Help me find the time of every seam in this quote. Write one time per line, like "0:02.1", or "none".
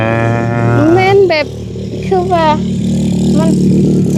none